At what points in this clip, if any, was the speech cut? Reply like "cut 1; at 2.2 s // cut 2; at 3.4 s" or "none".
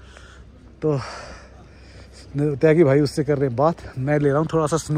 none